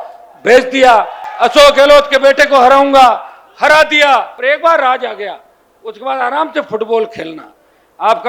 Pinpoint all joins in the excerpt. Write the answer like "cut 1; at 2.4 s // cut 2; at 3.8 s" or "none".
cut 1; at 1.2 s // cut 2; at 4.3 s